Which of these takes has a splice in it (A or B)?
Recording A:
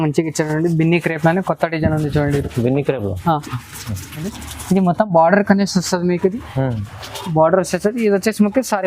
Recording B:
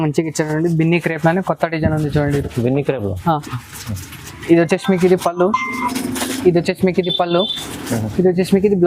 A